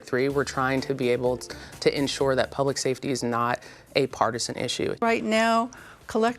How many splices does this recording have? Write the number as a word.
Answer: one